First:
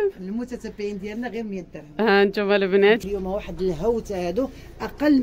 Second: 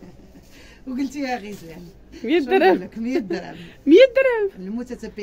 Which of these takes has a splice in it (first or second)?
first